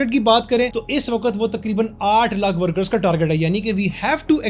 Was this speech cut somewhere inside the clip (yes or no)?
no